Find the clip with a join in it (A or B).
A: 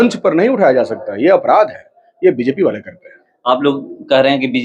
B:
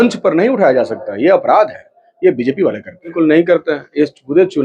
B